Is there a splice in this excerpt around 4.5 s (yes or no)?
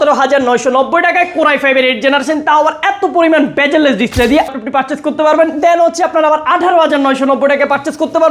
yes